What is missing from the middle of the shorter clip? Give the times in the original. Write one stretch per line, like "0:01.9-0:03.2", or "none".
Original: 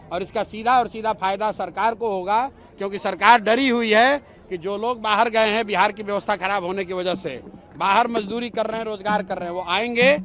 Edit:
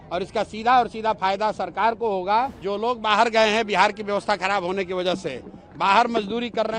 0:02.6-0:04.6